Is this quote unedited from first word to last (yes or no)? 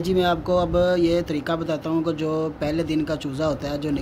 yes